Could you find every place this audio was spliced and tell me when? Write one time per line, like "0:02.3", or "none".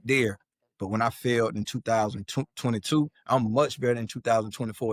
none